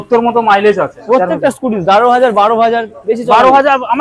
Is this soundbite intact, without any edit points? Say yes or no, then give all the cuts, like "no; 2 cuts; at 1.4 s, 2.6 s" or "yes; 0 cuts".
no; 1 cut; at 0.9 s